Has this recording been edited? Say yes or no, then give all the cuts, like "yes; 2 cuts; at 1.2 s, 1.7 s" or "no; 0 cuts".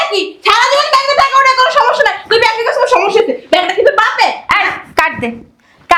no; 0 cuts